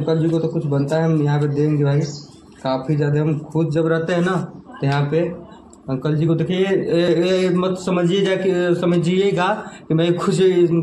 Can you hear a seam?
no; 0 cuts

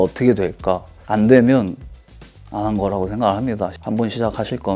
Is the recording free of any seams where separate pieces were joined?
no; 1 cut; at 1.0 s

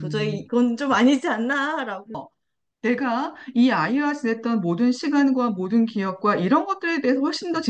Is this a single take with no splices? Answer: no; 1 cut; at 2.2 s

